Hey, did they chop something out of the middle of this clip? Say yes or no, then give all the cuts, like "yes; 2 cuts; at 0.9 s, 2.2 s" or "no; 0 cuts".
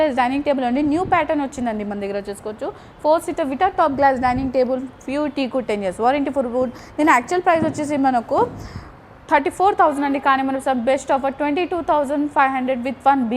no; 0 cuts